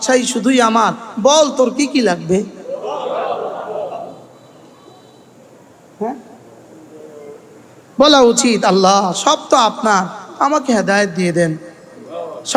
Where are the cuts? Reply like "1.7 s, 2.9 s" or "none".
none